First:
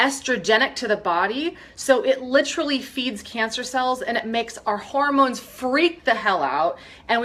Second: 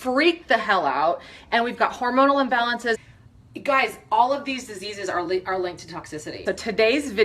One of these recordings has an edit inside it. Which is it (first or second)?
second